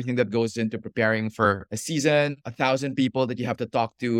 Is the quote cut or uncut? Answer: uncut